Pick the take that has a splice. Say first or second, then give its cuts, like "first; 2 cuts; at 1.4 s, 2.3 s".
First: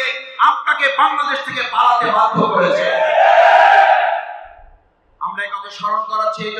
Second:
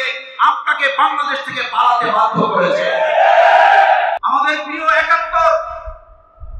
second; 1 cut; at 4.2 s